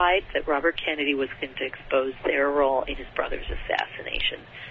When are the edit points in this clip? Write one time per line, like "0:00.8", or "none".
none